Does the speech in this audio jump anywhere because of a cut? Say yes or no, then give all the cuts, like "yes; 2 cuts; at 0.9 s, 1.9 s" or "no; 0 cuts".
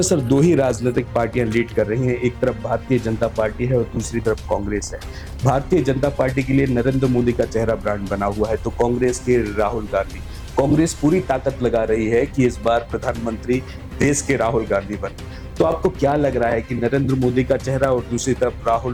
no; 0 cuts